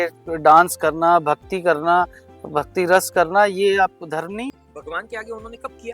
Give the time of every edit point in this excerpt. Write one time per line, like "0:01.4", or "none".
0:04.5